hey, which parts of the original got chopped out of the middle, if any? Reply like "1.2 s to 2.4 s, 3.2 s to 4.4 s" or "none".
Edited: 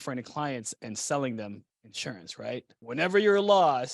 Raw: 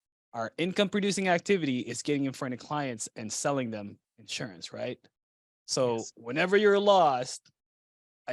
5.1 s to 6.2 s